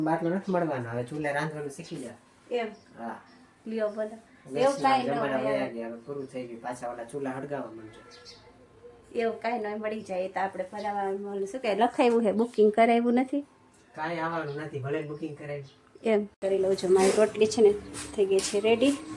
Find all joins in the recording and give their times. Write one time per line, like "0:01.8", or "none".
0:16.4

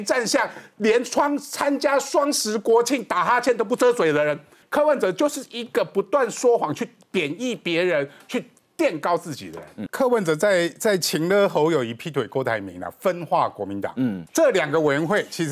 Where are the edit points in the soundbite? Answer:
0:04.6
0:09.8
0:14.2

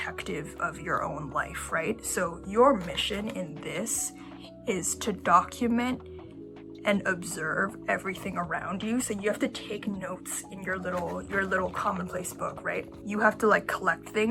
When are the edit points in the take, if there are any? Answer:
none

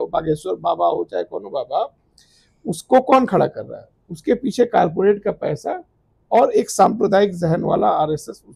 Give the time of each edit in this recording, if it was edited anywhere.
none

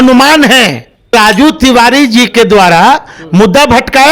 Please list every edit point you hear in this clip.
0:01.1

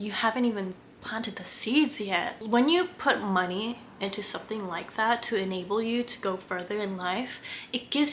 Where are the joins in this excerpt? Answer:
0:02.3

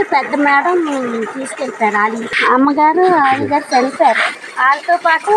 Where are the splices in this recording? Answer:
0:02.4
0:04.3

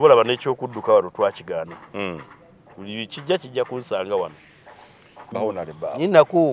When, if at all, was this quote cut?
0:05.2

